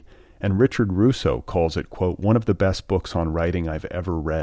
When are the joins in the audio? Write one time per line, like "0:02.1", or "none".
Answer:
none